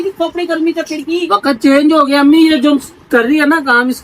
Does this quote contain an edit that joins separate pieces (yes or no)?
no